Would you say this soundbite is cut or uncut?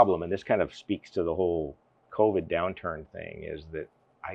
uncut